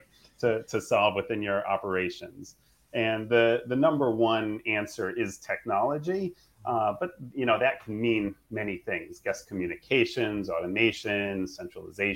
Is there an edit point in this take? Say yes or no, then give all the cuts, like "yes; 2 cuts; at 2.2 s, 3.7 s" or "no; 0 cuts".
no; 0 cuts